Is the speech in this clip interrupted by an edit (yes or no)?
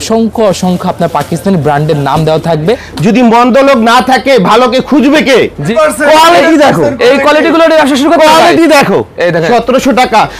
yes